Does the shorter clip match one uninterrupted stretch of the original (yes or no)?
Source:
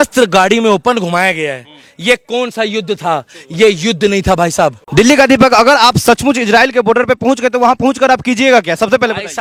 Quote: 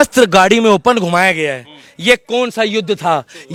yes